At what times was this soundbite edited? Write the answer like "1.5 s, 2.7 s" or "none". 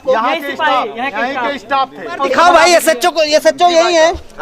2.3 s